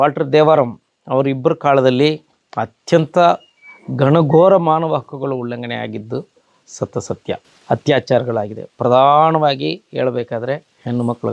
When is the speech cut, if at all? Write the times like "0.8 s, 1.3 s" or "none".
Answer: 7.5 s